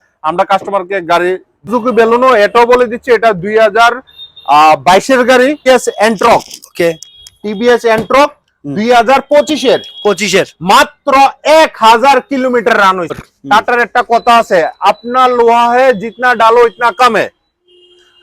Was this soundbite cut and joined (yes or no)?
yes